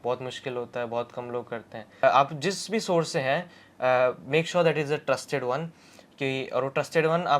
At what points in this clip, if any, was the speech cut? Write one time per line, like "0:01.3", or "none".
0:02.0